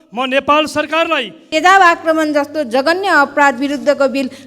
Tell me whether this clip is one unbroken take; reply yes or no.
no